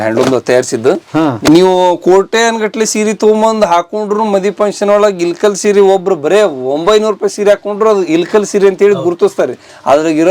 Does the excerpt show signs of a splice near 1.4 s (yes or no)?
yes